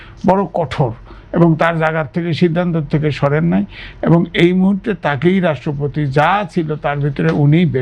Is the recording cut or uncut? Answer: uncut